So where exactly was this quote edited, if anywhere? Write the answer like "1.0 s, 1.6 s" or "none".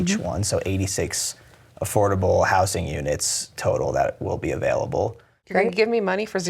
5.4 s